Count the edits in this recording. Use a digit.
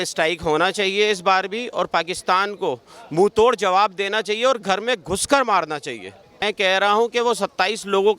1